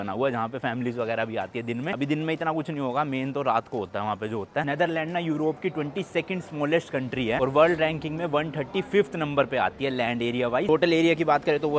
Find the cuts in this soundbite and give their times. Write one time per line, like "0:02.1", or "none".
none